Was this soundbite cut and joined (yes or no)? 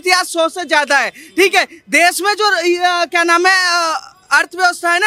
no